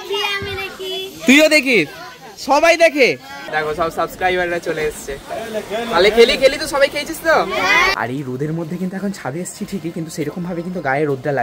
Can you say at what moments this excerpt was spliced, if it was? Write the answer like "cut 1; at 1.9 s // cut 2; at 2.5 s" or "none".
cut 1; at 3.4 s // cut 2; at 8.0 s